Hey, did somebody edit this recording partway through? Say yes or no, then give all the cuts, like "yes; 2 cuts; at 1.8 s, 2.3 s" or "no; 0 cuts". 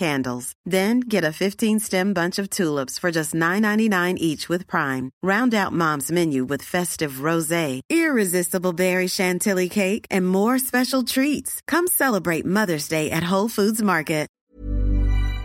yes; 1 cut; at 14.5 s